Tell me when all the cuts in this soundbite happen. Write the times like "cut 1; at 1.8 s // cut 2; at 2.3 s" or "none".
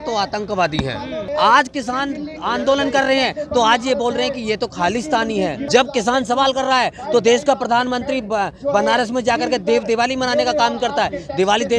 cut 1; at 1.2 s // cut 2; at 5.6 s